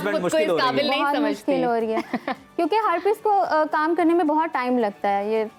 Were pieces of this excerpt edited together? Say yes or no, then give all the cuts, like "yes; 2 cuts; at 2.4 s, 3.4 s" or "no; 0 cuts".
no; 0 cuts